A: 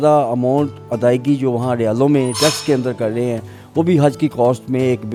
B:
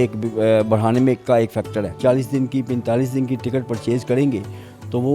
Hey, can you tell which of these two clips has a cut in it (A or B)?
B